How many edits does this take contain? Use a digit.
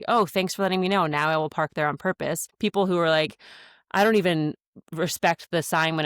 1